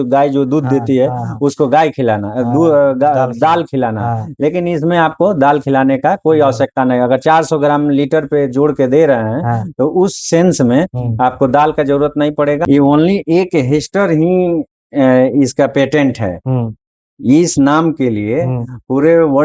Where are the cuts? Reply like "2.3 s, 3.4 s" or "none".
12.6 s